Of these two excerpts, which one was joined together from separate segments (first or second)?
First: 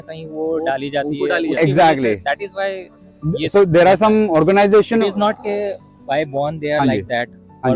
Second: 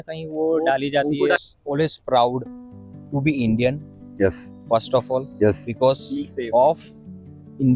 second